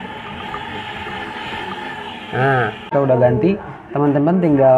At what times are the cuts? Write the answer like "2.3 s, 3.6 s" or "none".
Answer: 2.9 s